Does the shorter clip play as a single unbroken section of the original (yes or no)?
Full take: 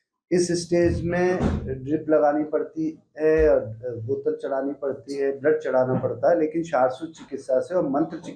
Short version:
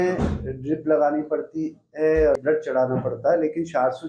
no